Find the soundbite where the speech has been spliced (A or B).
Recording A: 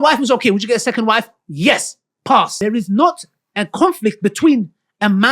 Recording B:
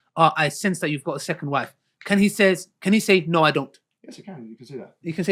A